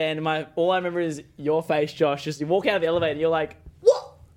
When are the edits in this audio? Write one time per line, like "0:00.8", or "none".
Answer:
none